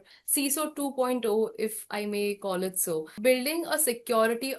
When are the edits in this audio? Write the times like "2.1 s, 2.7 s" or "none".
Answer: 3.1 s